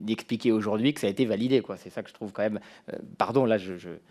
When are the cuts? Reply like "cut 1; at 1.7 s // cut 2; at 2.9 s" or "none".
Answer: none